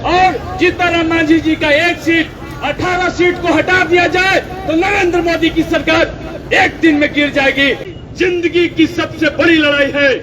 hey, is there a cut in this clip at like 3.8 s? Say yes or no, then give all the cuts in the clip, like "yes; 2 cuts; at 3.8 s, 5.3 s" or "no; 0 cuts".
no; 1 cut; at 7.9 s